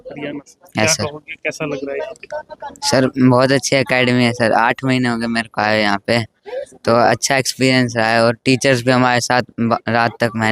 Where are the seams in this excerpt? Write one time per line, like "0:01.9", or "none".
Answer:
none